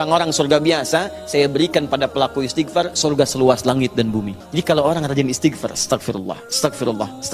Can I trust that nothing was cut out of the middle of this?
no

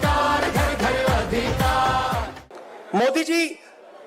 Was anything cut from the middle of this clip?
yes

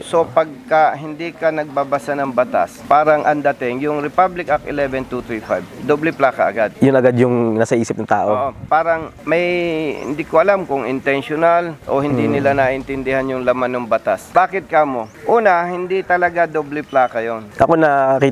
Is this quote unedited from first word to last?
yes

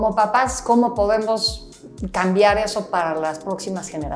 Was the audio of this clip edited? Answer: no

